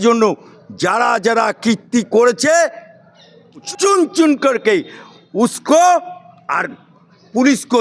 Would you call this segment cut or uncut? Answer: cut